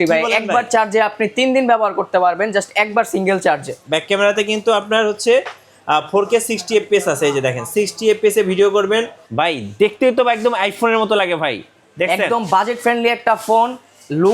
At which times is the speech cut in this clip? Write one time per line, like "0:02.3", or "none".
0:03.8
0:09.2